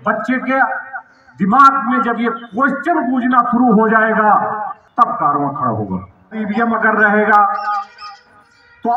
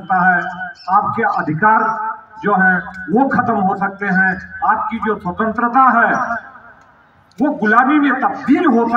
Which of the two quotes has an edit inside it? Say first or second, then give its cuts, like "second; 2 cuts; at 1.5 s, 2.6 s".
first; 2 cuts; at 4.8 s, 6.4 s